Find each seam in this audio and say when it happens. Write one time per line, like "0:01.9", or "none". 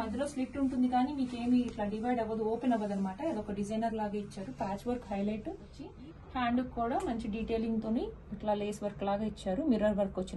0:05.8

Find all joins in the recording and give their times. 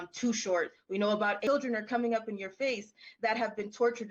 0:01.4

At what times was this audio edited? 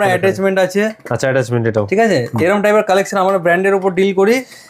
none

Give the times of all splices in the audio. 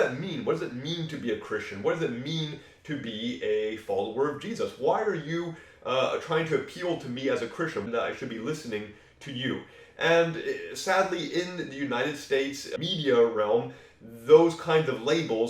0:07.8
0:12.7

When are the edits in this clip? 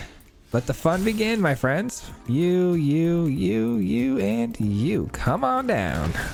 none

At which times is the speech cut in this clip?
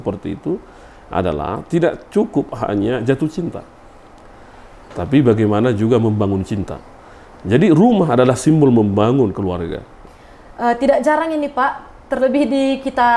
0:10.0

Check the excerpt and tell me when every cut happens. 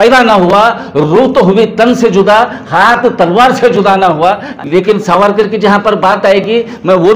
0:04.5

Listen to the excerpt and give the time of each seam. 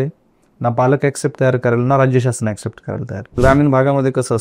0:03.4

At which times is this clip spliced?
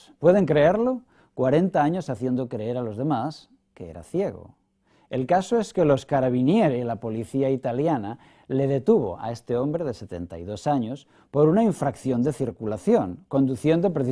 0:01.3

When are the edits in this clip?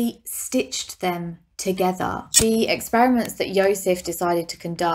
0:02.2

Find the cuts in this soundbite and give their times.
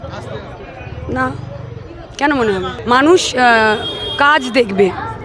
0:02.8

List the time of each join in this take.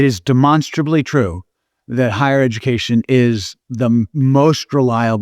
0:03.9

